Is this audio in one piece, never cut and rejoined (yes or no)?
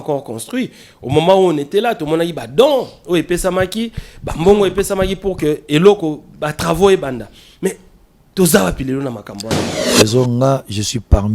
no